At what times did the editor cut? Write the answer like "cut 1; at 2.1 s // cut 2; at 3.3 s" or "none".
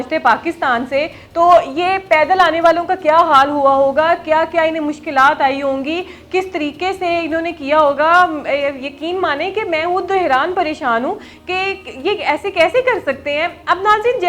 none